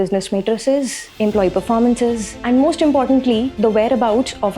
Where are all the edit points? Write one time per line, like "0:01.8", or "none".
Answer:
0:01.0
0:02.3